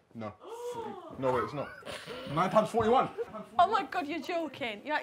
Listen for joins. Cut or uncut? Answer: cut